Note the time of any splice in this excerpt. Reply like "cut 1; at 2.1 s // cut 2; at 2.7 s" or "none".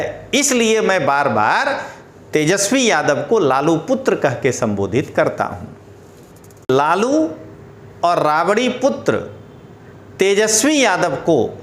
cut 1; at 6.7 s